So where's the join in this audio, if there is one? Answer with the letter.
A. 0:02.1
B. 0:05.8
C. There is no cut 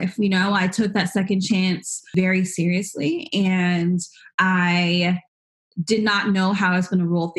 A